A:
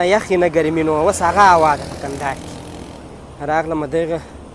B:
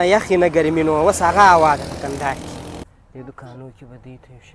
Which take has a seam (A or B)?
B